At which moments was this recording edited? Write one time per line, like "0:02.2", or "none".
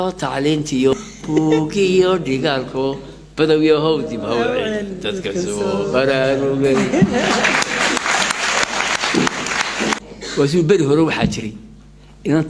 0:01.1
0:10.0